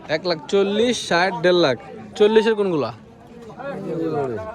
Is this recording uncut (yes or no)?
yes